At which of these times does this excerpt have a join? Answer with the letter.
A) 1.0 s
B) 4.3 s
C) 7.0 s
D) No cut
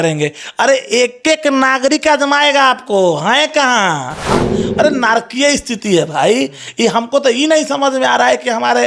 B